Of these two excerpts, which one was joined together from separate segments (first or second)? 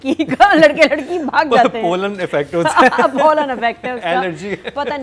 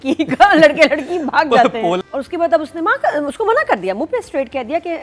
second